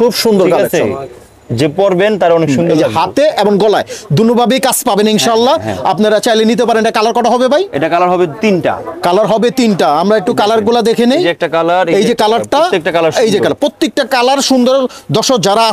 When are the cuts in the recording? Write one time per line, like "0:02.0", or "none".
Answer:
none